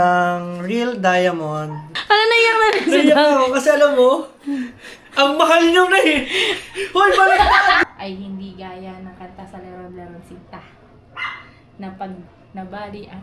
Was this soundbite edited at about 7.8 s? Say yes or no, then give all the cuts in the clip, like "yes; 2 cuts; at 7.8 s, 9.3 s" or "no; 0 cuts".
yes; 2 cuts; at 1.9 s, 7.8 s